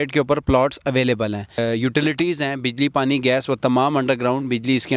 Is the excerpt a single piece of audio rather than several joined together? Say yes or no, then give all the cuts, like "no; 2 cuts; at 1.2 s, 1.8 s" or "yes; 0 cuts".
no; 1 cut; at 1.6 s